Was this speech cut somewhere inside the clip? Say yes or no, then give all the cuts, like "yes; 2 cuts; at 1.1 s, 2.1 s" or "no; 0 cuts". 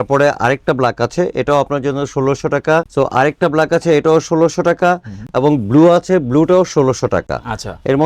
no; 0 cuts